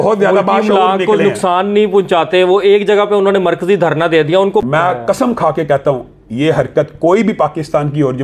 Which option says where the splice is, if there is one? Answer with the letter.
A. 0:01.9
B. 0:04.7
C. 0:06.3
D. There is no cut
B